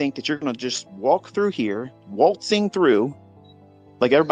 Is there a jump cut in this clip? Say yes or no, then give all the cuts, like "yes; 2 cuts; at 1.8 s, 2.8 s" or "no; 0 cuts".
no; 0 cuts